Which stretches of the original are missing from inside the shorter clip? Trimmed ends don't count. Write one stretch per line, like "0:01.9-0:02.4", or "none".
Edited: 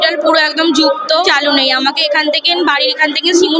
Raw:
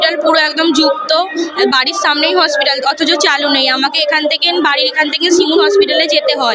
0:01.3-0:03.2